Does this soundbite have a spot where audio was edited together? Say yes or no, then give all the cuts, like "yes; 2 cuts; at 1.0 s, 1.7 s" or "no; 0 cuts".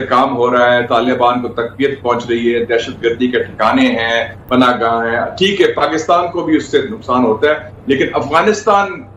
no; 0 cuts